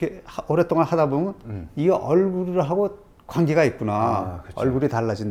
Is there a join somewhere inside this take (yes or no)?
no